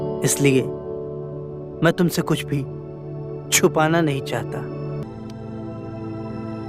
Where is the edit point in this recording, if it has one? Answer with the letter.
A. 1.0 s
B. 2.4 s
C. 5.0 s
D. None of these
C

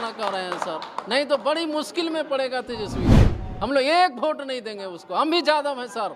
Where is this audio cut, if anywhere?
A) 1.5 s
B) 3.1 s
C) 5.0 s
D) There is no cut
D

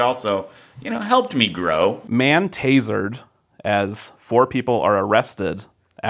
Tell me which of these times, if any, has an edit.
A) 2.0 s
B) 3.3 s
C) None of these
A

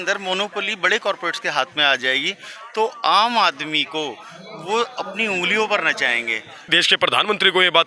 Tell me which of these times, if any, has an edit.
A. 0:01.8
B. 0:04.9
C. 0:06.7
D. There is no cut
C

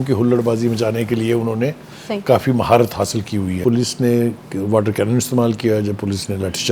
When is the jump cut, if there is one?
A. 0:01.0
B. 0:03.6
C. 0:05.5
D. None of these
B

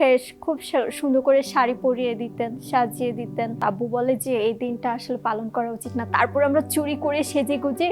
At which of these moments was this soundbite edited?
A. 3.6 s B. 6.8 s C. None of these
A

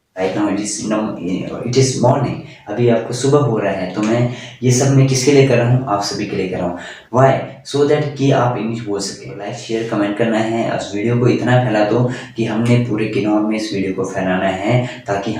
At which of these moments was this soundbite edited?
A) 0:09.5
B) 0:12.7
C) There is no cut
A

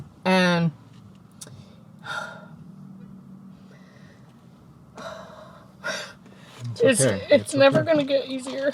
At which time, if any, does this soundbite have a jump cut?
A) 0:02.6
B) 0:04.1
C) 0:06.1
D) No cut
D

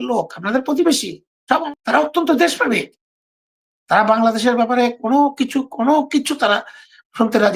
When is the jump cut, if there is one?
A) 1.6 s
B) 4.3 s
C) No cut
A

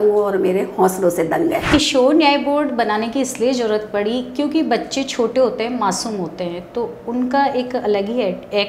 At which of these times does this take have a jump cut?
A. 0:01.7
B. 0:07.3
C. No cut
A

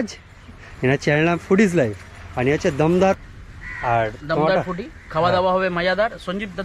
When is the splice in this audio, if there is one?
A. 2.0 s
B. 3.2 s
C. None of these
B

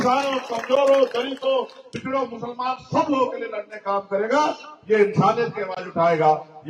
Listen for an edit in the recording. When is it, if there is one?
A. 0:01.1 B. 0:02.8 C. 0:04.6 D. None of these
D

